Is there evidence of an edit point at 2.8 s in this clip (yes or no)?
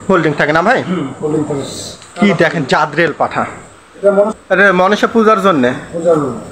no